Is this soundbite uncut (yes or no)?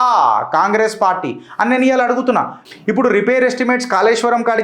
no